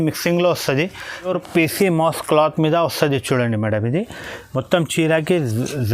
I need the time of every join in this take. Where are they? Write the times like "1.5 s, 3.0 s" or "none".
1.3 s